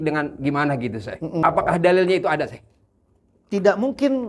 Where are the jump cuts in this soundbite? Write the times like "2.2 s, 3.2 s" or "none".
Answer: 1.4 s